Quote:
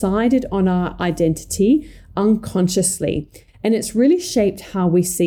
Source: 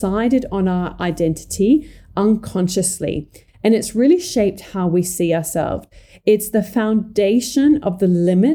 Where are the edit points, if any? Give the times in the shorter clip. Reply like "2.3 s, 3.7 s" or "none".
none